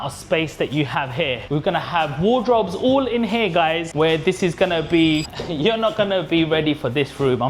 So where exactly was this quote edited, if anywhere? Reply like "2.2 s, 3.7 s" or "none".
1.4 s, 5.3 s